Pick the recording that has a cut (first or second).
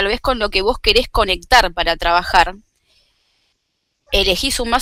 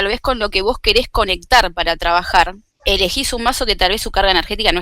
second